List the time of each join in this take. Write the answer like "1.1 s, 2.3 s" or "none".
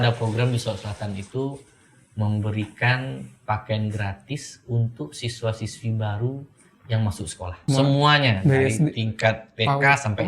7.6 s